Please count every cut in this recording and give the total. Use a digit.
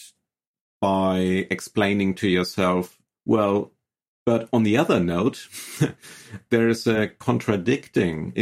1